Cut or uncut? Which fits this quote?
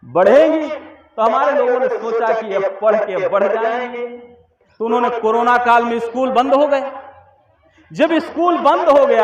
uncut